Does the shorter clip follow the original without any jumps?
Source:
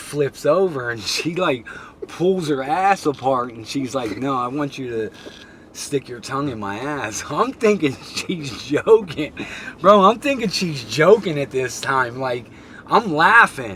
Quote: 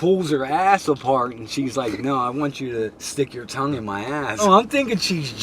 no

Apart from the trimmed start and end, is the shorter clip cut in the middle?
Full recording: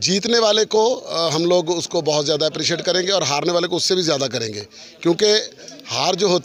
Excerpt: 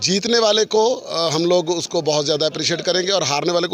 no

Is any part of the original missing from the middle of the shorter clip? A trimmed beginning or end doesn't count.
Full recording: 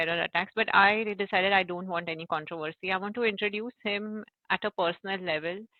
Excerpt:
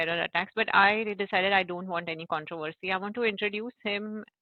no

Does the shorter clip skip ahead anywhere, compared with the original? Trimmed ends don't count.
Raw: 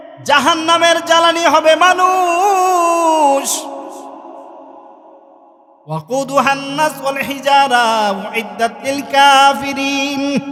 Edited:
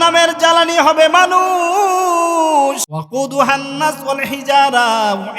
yes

